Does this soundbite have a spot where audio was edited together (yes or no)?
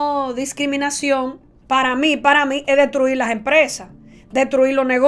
no